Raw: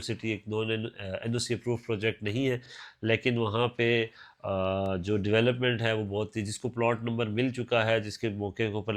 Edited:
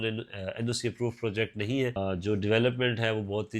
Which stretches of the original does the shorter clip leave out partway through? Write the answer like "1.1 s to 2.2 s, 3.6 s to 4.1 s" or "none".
2.6 s to 4.8 s